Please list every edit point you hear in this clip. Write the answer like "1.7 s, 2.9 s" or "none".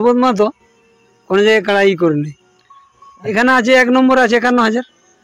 3.3 s